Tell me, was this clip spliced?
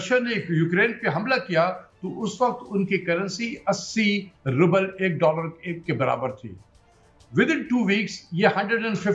no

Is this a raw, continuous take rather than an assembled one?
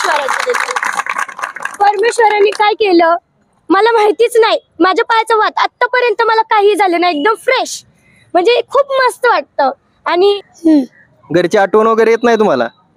no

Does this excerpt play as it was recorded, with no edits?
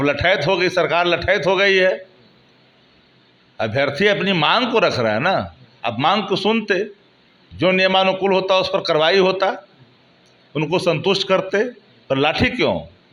yes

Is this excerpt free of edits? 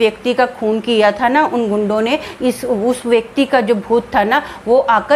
yes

